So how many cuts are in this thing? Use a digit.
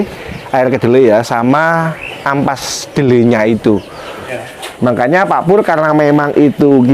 1